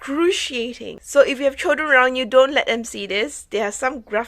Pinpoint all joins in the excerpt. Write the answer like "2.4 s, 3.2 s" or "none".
0.9 s